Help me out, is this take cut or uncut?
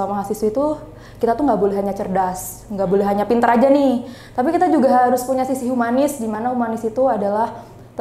uncut